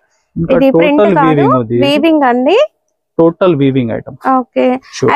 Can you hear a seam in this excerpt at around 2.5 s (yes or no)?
no